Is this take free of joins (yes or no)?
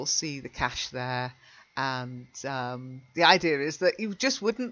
yes